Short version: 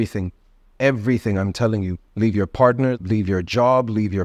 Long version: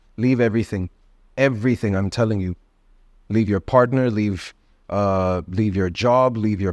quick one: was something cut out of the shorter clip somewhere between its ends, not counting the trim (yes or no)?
yes